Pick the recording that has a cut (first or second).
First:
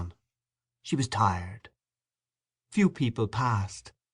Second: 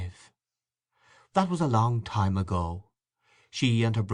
first